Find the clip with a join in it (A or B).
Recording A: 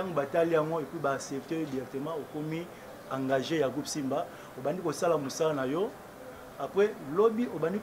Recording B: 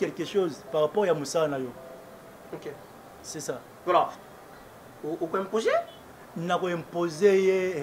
B